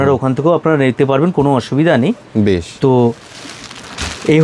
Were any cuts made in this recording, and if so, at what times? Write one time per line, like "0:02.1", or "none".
none